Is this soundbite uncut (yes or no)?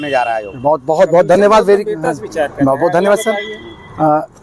yes